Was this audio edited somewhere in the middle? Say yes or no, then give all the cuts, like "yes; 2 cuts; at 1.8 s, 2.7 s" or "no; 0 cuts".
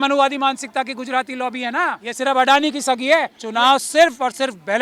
yes; 2 cuts; at 2.0 s, 3.4 s